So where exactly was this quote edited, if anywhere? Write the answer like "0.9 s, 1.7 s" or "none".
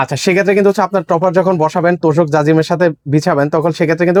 none